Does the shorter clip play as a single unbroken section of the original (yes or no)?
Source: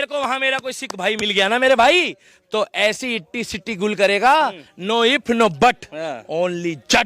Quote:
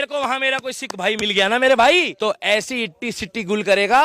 no